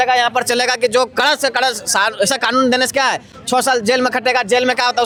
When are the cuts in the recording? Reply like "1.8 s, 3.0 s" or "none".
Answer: none